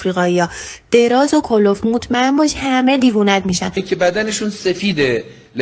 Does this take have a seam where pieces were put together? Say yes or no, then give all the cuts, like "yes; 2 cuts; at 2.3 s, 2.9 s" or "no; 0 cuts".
yes; 1 cut; at 3.8 s